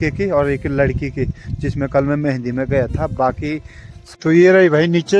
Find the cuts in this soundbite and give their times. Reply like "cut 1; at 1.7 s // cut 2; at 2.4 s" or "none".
cut 1; at 4.0 s